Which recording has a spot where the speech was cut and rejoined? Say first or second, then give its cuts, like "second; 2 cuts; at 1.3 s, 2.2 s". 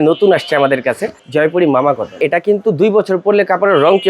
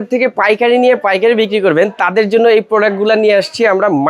first; 2 cuts; at 1.2 s, 2.2 s